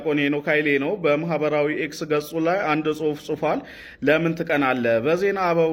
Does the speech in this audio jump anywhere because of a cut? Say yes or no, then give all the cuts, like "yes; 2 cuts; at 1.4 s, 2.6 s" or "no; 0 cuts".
no; 0 cuts